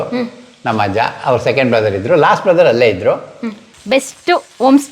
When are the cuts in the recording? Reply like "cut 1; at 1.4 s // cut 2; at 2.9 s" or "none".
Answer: cut 1; at 3.7 s